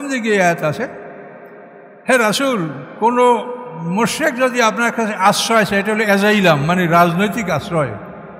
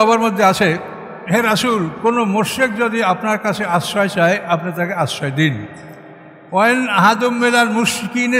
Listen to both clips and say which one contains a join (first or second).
second